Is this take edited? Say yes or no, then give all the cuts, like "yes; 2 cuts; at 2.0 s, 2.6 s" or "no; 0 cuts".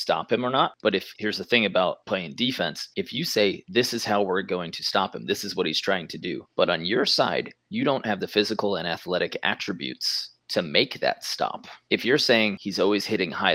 yes; 1 cut; at 1.1 s